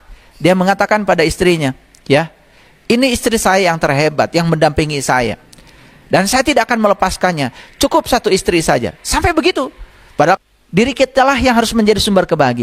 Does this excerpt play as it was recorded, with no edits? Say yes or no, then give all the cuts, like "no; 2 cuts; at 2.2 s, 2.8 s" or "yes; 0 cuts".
no; 1 cut; at 10.4 s